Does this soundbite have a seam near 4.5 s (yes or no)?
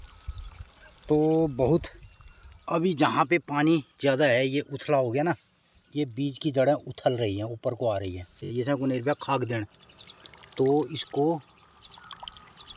no